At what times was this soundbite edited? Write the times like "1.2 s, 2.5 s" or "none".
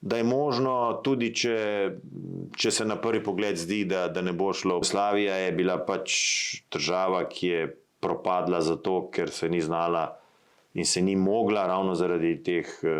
4.9 s

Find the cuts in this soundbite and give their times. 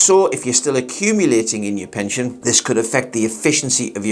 none

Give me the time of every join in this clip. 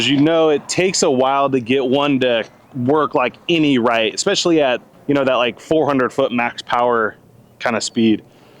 4.9 s

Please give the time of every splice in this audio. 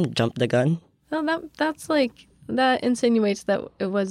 0.9 s

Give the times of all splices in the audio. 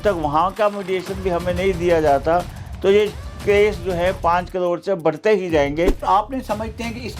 6.0 s

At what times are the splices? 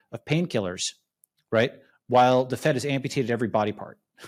none

